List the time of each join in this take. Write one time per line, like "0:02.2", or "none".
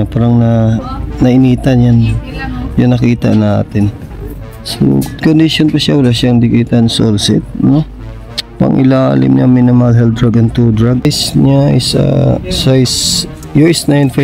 0:11.0

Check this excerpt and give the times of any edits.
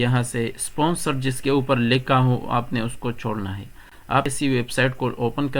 0:04.3

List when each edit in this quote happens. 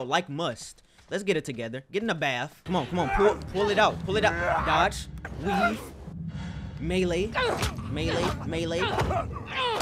0:02.6

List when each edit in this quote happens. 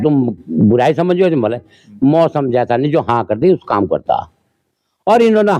none

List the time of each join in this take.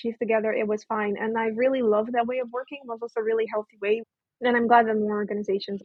0:04.1

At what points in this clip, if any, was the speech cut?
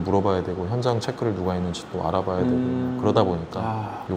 none

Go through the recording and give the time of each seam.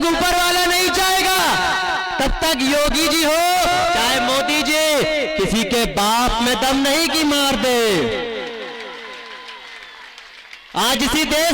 0:01.4

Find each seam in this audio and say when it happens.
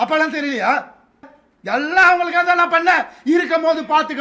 0:01.3

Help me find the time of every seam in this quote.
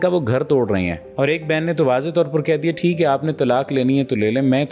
0:01.1

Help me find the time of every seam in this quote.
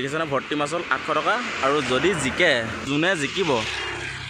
0:02.8

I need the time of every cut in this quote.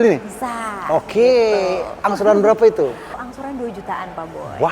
0:03.1

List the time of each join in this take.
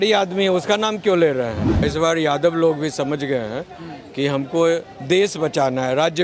0:01.8

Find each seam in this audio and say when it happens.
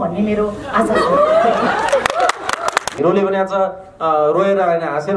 0:02.9

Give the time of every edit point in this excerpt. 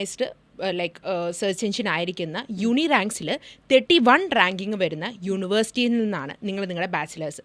none

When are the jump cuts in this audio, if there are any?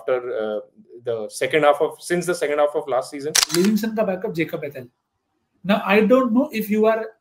0:03.4

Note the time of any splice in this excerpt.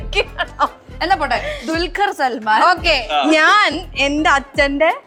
none

